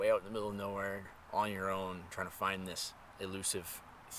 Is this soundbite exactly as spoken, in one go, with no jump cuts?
no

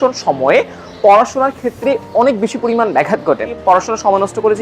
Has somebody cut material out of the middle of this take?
yes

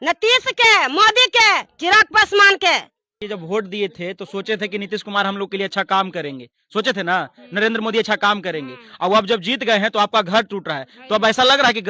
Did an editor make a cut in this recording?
yes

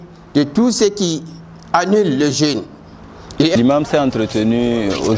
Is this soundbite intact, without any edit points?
no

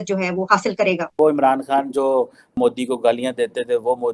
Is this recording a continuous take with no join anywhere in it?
no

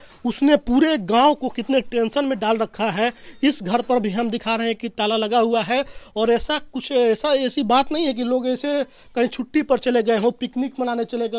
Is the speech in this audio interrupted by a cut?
no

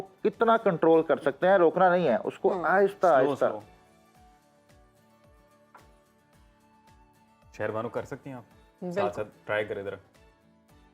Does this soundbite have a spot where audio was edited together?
no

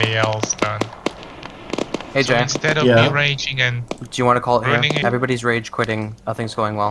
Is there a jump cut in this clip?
yes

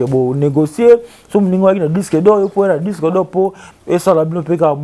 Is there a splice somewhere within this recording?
no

